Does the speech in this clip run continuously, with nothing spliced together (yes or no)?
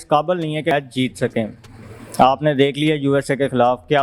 yes